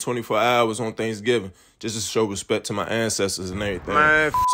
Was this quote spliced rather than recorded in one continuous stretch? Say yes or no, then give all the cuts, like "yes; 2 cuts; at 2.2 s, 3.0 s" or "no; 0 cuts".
no; 0 cuts